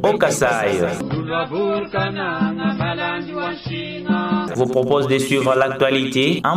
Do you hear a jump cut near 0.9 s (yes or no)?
yes